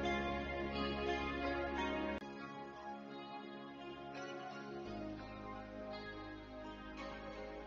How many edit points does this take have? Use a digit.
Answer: 1